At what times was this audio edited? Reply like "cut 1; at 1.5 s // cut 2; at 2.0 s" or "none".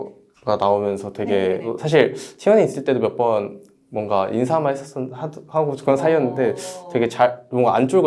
cut 1; at 1.7 s